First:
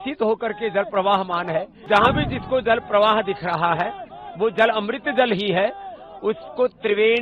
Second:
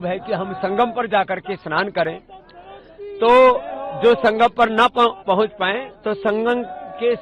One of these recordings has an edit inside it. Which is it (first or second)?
first